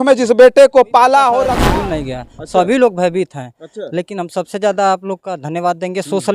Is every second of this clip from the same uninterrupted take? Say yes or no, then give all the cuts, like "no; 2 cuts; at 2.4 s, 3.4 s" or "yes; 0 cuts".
no; 1 cut; at 1.4 s